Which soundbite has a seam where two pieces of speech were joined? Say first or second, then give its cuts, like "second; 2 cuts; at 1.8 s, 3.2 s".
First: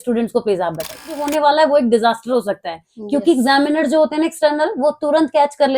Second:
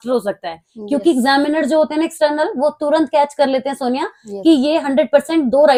first; 1 cut; at 1.2 s